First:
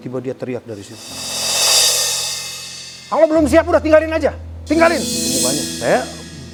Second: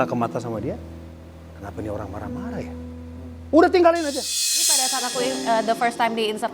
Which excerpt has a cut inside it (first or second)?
second